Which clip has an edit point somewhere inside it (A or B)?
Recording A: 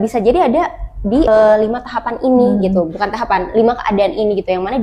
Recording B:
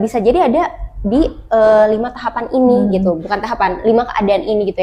A